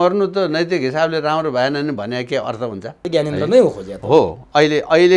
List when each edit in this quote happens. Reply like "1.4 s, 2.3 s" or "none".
3.1 s

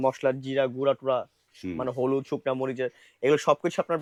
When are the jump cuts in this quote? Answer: none

